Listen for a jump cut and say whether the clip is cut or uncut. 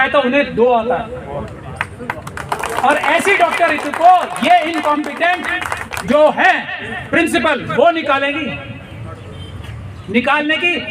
uncut